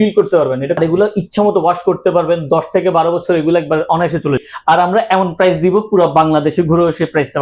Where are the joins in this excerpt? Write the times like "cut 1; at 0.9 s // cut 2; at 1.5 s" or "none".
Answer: cut 1; at 0.8 s // cut 2; at 4.4 s